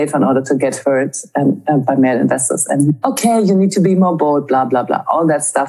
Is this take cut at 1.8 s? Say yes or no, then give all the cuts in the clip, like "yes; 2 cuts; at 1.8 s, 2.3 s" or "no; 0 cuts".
yes; 2 cuts; at 1.8 s, 2.9 s